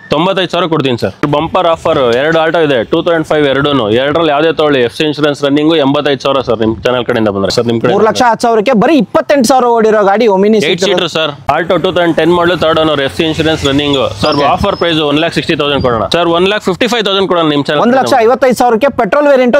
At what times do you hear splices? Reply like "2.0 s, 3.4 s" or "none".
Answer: 1.2 s, 7.5 s, 11.4 s, 16.1 s